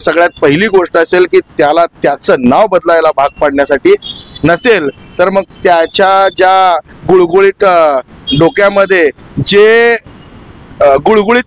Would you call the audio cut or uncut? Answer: uncut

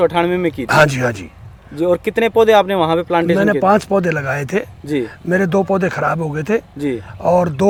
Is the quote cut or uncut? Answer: uncut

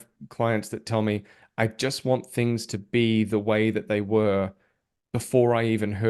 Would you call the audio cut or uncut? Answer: uncut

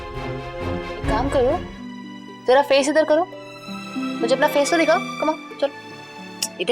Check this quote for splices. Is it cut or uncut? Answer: cut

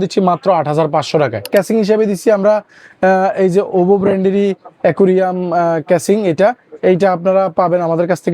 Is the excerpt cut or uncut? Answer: cut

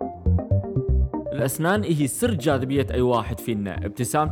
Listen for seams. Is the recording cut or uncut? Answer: cut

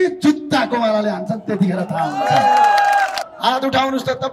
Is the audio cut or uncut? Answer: cut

